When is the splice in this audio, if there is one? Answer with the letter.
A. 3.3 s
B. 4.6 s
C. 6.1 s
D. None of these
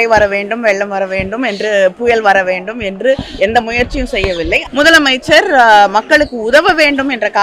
B